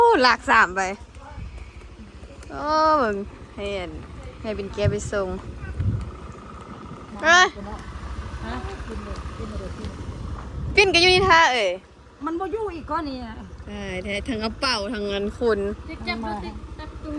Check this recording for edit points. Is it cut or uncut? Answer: uncut